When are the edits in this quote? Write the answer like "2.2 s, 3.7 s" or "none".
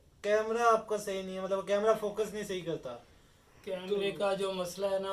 none